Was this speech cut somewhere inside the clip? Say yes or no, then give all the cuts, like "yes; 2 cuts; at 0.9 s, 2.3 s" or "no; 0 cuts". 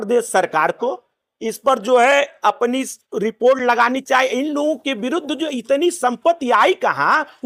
no; 0 cuts